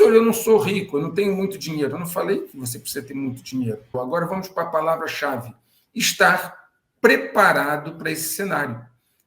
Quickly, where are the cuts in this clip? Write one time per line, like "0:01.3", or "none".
0:03.9